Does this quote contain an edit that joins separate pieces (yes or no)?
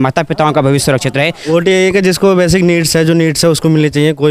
yes